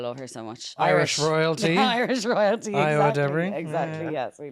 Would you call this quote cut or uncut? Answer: uncut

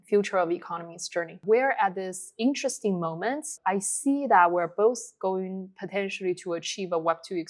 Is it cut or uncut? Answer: cut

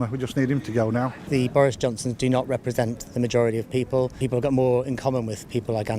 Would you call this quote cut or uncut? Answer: cut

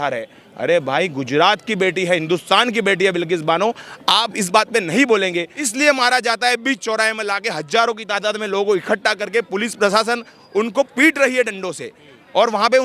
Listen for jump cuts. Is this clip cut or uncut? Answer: cut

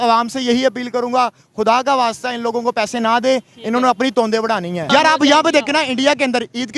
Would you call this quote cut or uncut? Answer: cut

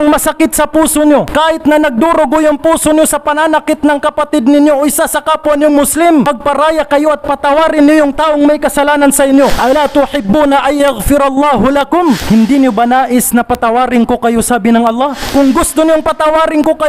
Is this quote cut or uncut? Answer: cut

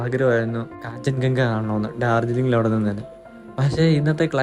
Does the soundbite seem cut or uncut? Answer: uncut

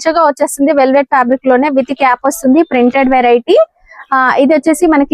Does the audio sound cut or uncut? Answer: uncut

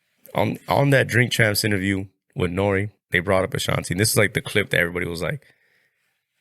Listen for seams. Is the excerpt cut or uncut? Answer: cut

